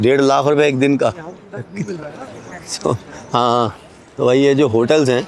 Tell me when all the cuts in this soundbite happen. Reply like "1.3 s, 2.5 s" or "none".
none

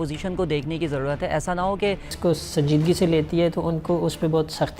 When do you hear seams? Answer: 2.1 s

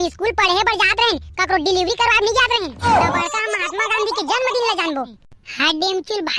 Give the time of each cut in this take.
5.1 s

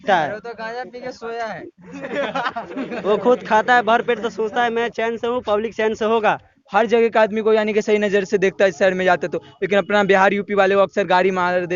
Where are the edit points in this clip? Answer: 6.6 s

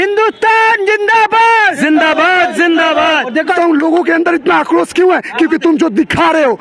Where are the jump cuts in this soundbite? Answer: 3.5 s

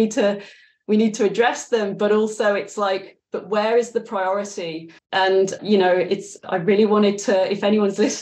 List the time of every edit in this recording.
5.3 s, 6.3 s

